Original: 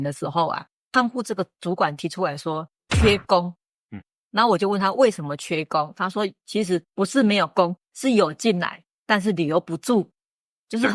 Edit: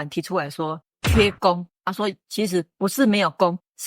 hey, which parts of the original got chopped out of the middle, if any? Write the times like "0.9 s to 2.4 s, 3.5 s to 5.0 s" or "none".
3.7 s to 6.0 s